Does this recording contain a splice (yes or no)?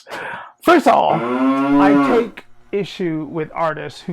yes